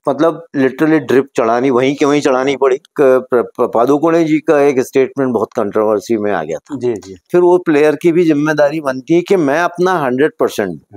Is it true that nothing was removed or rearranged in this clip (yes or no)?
no